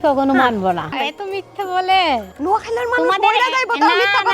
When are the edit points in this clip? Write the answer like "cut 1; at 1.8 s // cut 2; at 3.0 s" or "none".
cut 1; at 0.9 s // cut 2; at 2.3 s